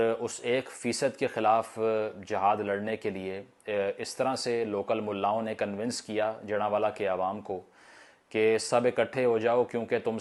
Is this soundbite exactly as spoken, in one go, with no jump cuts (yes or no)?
yes